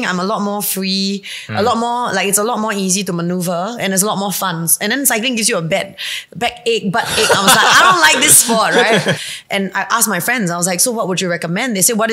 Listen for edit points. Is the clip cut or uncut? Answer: cut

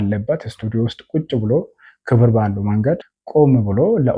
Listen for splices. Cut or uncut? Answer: cut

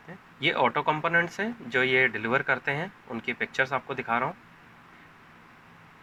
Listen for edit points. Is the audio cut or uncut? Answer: uncut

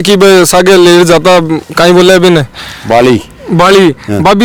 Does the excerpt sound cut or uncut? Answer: uncut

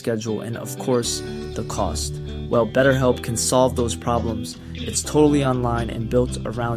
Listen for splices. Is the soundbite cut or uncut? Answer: uncut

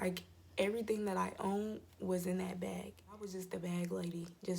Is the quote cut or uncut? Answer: cut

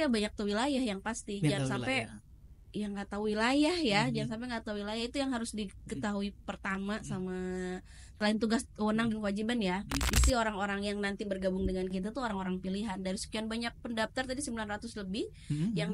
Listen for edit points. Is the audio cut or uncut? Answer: cut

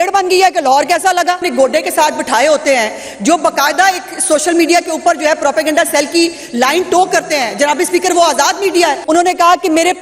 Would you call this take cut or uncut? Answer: cut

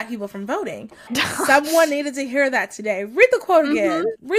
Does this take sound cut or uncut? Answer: cut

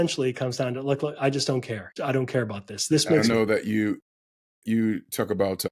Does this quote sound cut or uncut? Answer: cut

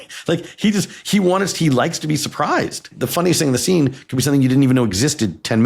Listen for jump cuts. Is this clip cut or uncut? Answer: cut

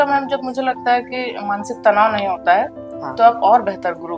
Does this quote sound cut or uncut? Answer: uncut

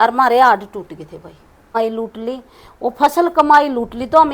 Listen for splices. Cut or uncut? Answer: cut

